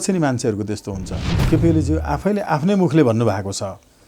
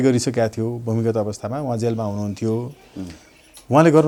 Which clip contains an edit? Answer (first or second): first